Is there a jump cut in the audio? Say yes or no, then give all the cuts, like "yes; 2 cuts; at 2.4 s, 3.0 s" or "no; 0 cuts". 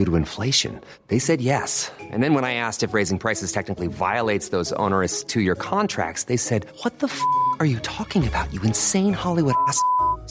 no; 0 cuts